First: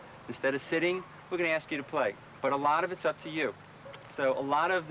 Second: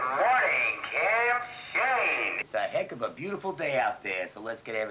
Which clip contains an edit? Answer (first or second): second